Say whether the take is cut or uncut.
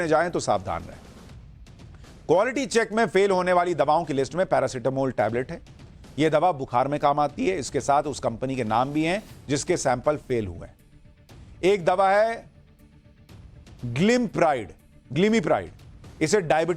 uncut